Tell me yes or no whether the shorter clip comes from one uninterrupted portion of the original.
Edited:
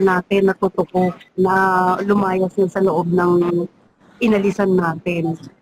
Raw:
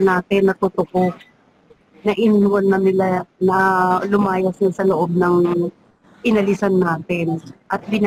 no